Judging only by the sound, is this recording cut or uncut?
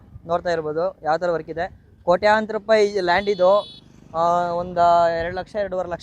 uncut